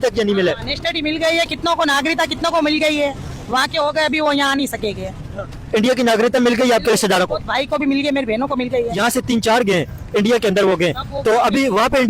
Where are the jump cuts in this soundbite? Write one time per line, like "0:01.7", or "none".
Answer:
0:09.0

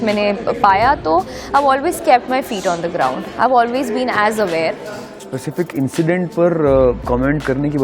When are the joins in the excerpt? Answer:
0:05.1

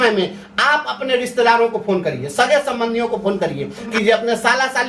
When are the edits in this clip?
0:03.9

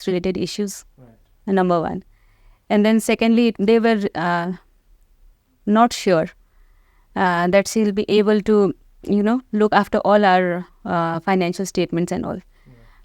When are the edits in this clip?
none

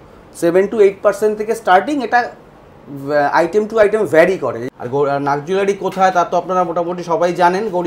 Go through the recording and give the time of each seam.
0:04.6

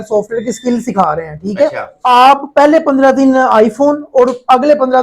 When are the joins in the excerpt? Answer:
0:01.9

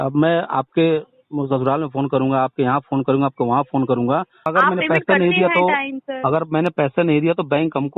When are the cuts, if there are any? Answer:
0:04.5

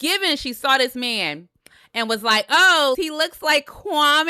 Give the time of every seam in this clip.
0:03.0

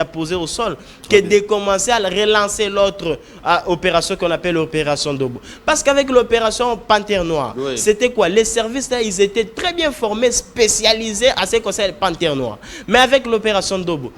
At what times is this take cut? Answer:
none

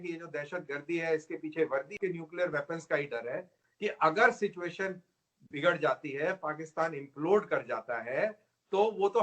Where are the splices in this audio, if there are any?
0:01.9

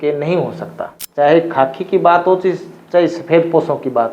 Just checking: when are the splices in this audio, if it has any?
0:01.0

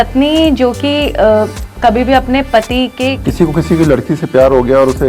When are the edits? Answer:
0:03.2

